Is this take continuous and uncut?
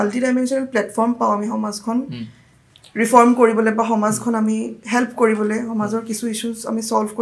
yes; 0 cuts

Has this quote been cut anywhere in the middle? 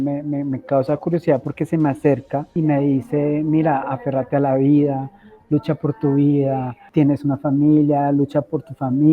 yes; 2 cuts; at 2.5 s, 6.8 s

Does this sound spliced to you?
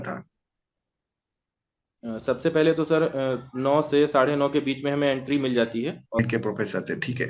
yes; 1 cut; at 6.2 s

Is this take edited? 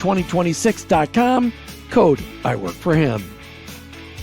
yes; 1 cut; at 3.3 s

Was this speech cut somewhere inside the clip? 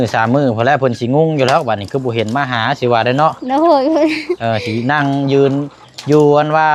no; 0 cuts

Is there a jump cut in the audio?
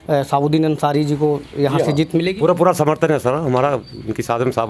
no; 0 cuts

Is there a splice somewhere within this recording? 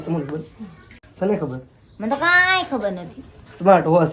no; 0 cuts

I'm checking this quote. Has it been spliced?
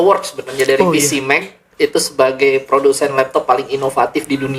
no; 0 cuts

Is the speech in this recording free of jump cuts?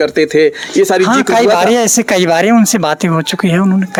yes; 0 cuts

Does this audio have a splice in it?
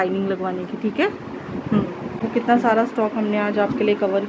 yes; 1 cut; at 2.2 s

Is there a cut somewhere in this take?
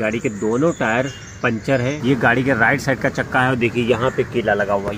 yes; 1 cut; at 2.0 s

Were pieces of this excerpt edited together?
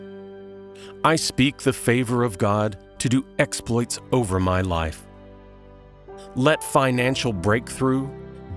no; 0 cuts

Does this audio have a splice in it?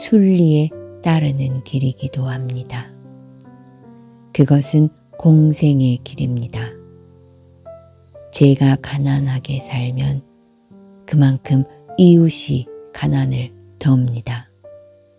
yes; 4 cuts; at 2.8 s, 4.3 s, 6.5 s, 8.4 s

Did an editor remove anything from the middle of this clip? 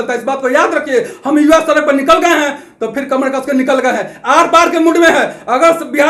no; 0 cuts

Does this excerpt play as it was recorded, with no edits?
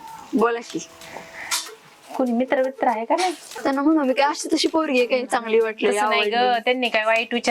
no; 1 cut; at 3.5 s

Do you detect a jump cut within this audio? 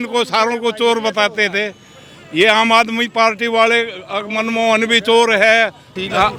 no; 0 cuts

